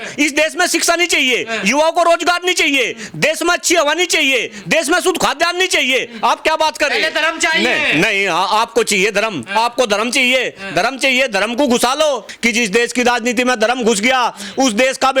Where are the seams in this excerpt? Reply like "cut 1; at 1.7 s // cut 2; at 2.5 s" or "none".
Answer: cut 1; at 12.3 s